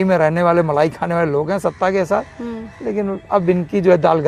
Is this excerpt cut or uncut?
uncut